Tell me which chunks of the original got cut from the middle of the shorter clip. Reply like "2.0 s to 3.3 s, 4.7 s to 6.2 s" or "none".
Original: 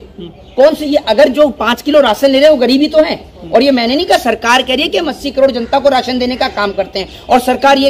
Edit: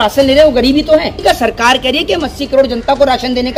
3.2 s to 4.0 s